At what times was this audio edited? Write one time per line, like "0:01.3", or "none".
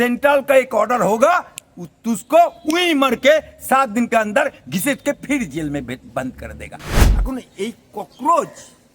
0:07.0